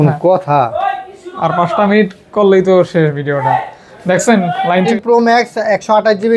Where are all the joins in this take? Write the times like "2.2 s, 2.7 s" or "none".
4.9 s